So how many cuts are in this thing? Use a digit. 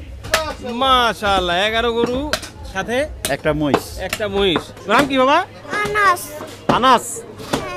2